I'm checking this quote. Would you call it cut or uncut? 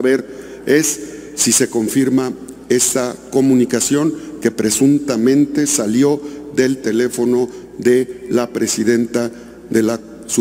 uncut